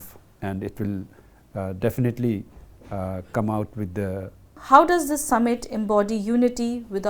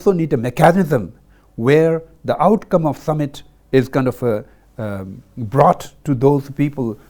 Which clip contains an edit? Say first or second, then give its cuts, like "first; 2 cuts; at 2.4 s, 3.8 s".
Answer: first; 1 cut; at 4.6 s